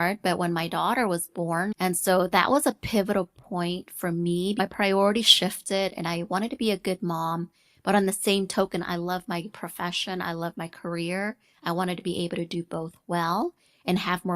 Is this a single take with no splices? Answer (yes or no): no